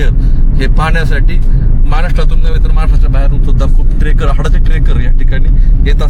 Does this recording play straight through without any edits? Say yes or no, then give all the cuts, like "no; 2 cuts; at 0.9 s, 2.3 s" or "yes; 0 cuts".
yes; 0 cuts